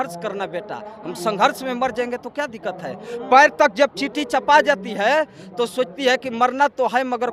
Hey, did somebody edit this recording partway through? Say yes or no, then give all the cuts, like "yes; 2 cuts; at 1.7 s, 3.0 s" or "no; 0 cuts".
no; 0 cuts